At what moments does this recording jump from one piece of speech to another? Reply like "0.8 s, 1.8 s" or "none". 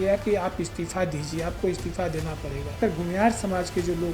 2.8 s

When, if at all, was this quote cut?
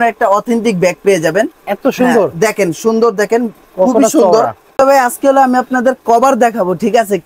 4.6 s

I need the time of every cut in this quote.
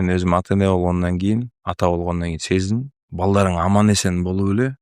3.0 s

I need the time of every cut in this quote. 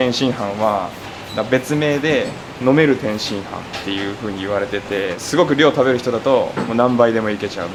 none

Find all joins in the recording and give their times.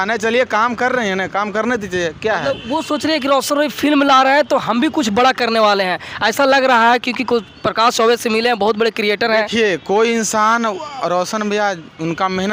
none

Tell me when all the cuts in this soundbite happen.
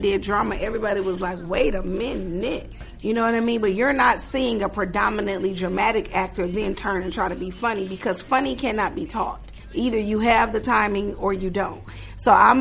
2.8 s, 9.5 s

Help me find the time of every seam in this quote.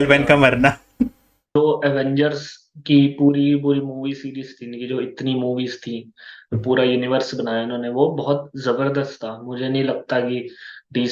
1.6 s

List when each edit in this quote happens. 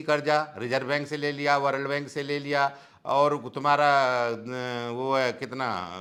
none

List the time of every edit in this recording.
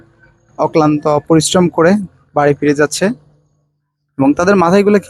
none

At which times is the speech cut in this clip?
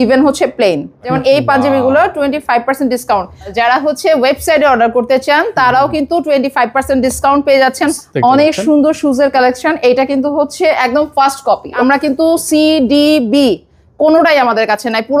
1.1 s, 3.5 s, 7.9 s, 11.8 s

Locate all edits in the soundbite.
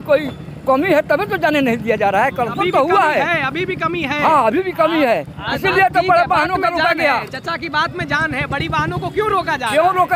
none

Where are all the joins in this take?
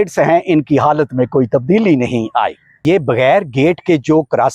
2.8 s

